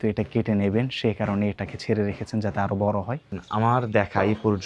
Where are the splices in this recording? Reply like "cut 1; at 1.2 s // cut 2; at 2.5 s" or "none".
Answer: cut 1; at 3.3 s